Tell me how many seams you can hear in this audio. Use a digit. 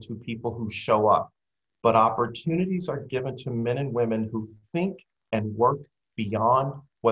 0